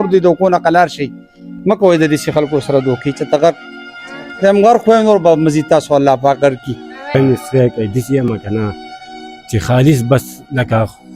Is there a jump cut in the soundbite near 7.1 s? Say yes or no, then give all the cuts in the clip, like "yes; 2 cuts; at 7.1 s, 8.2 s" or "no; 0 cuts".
yes; 1 cut; at 7.1 s